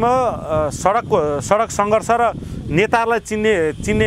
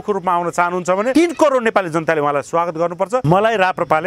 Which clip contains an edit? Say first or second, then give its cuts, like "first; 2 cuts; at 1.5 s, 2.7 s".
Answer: second; 2 cuts; at 1.1 s, 3.2 s